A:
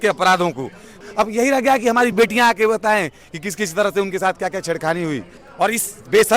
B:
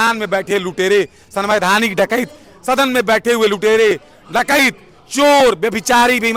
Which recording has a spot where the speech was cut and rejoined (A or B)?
A